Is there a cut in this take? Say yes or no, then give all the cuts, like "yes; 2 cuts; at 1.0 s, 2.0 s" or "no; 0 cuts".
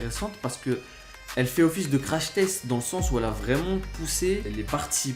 no; 0 cuts